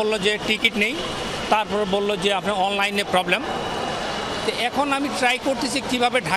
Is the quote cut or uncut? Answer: uncut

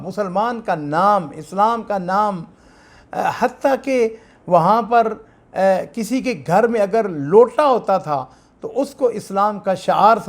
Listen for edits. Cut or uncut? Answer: uncut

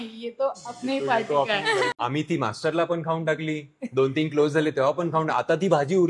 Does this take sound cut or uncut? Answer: cut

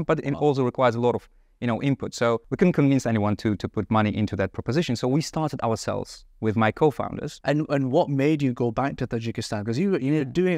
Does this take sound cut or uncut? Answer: uncut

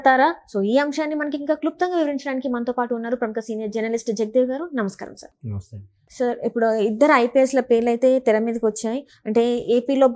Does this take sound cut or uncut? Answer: uncut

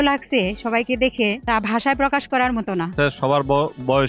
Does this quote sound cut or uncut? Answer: cut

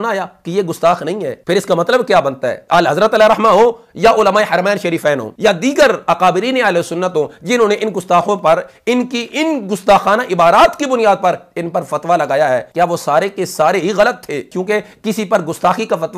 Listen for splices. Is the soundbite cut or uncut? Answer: uncut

